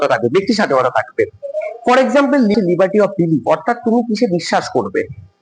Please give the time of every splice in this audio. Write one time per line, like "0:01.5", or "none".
0:02.5